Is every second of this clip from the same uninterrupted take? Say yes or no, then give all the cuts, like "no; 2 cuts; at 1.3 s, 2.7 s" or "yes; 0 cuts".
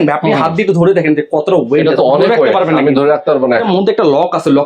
no; 1 cut; at 3.6 s